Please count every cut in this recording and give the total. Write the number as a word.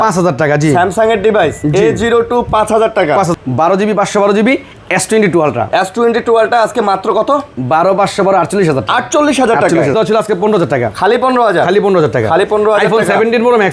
two